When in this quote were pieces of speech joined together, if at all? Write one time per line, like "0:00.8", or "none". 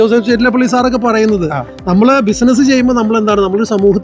none